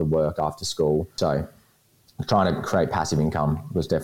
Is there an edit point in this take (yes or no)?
yes